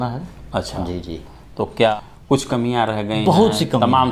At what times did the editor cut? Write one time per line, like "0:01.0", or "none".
0:01.9